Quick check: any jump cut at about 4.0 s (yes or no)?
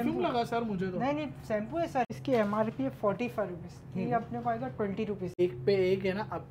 no